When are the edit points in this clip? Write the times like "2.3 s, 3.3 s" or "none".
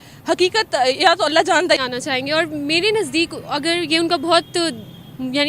1.8 s